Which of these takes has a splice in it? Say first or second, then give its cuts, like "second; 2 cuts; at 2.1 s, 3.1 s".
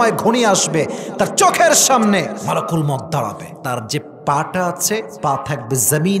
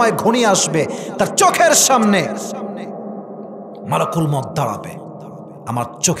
first; 3 cuts; at 2.4 s, 3.5 s, 5.1 s